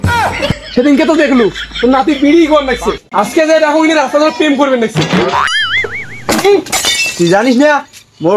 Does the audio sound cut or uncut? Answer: cut